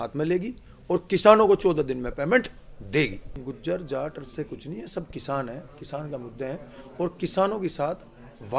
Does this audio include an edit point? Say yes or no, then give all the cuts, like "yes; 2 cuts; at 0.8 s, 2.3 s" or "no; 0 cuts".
yes; 1 cut; at 3.3 s